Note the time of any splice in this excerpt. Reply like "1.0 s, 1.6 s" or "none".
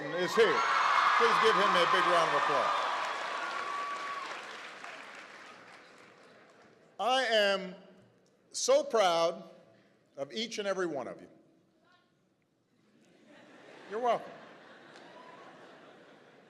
none